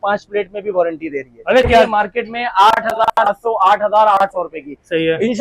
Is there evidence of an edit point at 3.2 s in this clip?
no; 1 cut; at 1.9 s

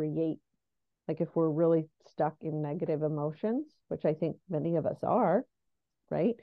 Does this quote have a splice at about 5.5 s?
no; 0 cuts

